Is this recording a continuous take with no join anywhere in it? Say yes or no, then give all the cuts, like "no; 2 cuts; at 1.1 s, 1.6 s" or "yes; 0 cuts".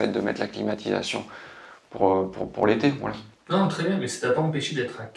yes; 0 cuts